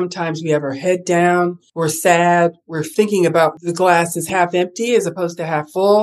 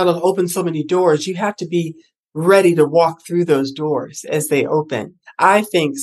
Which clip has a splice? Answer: first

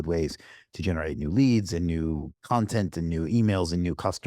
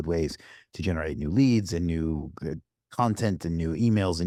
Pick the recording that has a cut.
first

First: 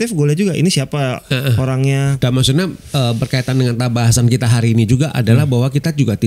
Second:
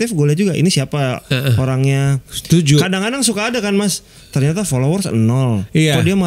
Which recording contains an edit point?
first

